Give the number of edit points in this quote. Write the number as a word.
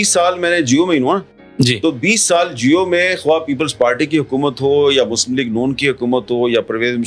zero